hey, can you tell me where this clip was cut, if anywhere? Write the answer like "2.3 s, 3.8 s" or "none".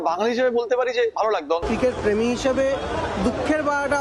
1.6 s